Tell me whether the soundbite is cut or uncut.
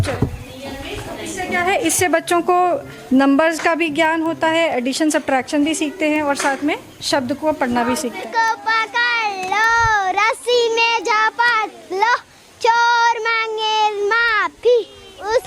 cut